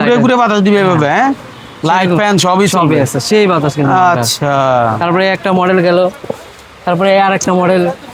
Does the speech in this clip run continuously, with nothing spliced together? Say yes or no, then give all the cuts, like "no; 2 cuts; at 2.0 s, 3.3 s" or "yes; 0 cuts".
yes; 0 cuts